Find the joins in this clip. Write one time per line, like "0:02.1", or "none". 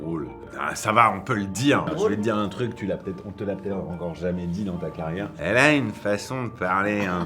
0:01.9
0:05.3

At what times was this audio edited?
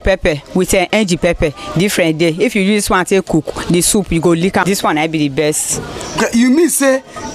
0:04.6

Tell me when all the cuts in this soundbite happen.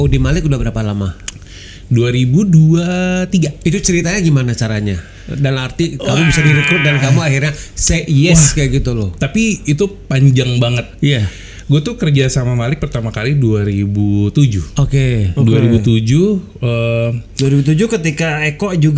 none

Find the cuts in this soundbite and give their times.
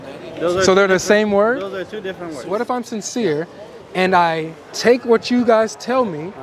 0:02.6

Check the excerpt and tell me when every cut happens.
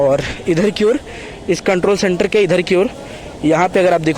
none

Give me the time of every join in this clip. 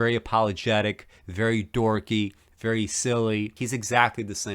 0:03.6

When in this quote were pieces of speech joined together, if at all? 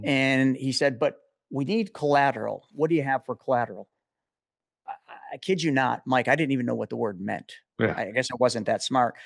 none

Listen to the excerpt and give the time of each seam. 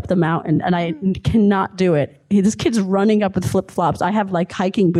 none

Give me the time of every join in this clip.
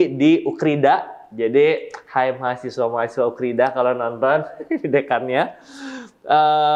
none

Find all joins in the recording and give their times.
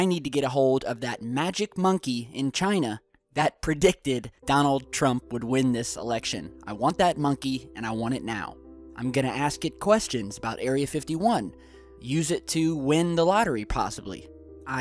0:12.3

